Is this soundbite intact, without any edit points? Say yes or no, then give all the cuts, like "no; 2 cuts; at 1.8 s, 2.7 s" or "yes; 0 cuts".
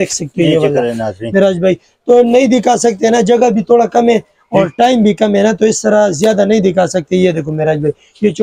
yes; 0 cuts